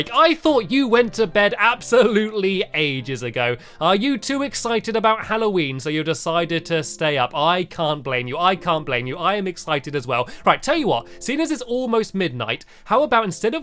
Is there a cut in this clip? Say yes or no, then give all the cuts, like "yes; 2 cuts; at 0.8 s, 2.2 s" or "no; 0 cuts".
no; 0 cuts